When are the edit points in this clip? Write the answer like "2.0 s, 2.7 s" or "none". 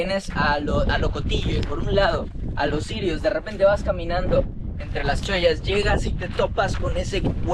none